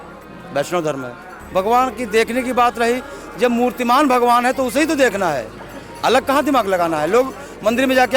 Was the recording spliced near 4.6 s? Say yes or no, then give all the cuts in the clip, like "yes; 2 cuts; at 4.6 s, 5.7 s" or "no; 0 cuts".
no; 1 cut; at 1.3 s